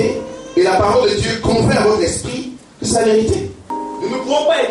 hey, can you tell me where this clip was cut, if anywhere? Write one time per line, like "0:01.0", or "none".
0:03.6